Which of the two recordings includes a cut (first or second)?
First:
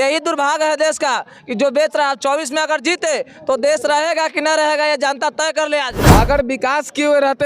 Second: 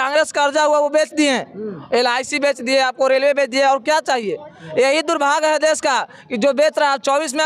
first